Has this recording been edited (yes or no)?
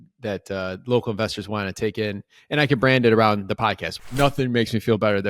yes